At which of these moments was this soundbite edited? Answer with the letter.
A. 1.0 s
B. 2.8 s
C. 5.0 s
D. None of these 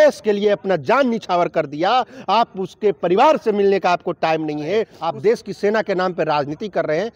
C